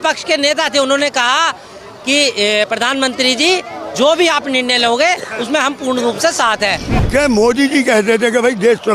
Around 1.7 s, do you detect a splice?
no; 1 cut; at 6.9 s

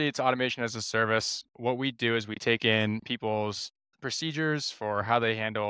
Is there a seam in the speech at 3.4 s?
no; 1 cut; at 1.4 s

